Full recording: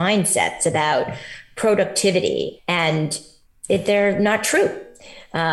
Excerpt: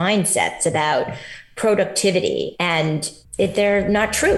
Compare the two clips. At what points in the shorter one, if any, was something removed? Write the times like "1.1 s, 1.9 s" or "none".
2.7 s